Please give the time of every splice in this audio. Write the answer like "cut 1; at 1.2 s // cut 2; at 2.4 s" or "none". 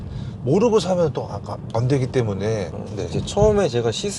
cut 1; at 2.8 s